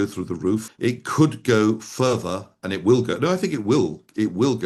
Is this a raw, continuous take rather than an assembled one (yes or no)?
yes